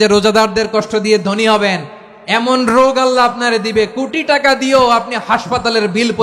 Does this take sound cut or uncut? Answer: uncut